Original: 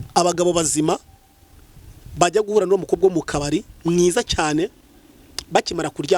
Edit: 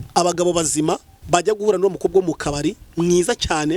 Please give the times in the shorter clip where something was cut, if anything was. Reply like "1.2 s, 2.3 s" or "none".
1.1 s